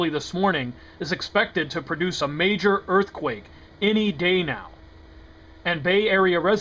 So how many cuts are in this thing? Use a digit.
1